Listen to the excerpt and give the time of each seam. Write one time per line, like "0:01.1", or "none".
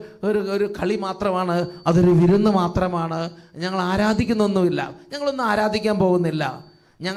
none